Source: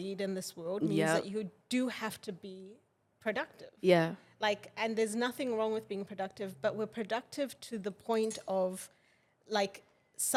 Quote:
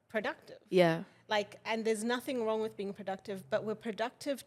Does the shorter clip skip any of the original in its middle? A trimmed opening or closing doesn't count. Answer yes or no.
no